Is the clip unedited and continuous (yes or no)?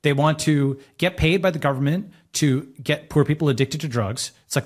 yes